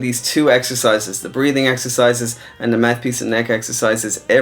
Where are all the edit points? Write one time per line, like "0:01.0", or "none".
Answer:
none